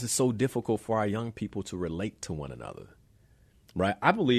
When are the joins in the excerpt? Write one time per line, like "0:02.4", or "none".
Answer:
none